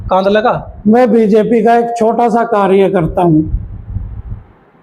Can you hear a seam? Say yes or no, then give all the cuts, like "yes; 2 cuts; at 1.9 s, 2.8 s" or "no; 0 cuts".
no; 0 cuts